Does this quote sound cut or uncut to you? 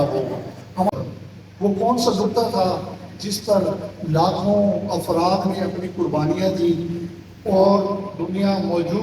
cut